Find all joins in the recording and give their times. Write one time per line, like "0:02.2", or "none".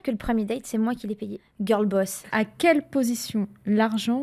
0:01.4
0:02.2